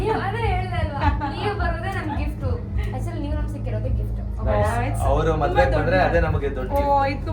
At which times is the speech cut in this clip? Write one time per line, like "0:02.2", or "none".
none